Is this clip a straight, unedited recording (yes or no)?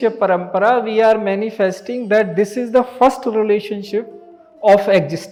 yes